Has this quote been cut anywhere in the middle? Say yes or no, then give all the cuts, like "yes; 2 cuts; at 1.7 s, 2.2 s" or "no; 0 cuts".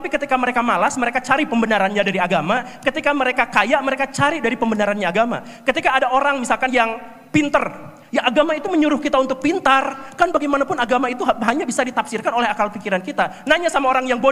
no; 0 cuts